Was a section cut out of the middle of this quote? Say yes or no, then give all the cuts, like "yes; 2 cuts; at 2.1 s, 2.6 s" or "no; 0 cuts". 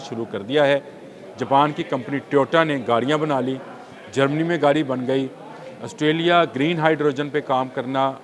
no; 0 cuts